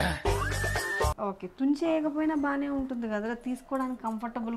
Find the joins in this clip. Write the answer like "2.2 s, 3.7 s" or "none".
1.2 s

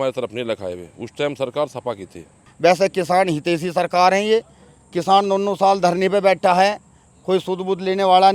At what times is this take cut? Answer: 2.4 s

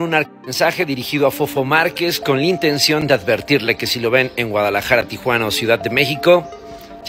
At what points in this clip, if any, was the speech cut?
none

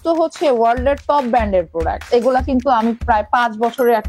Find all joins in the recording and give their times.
2.0 s

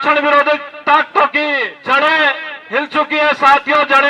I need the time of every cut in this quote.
1.7 s

